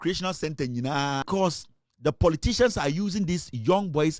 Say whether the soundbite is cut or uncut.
cut